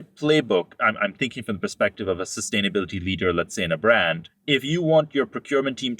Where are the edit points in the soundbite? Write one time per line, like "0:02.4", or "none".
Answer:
0:04.3